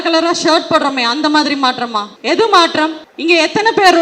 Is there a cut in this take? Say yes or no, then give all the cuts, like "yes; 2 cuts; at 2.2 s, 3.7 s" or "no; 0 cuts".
yes; 2 cuts; at 2.1 s, 3.1 s